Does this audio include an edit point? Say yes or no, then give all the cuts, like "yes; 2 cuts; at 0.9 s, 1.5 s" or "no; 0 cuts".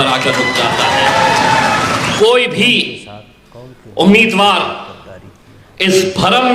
yes; 1 cut; at 2.1 s